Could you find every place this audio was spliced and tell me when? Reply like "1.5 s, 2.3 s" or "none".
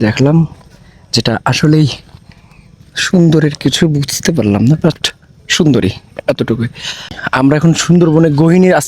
7.1 s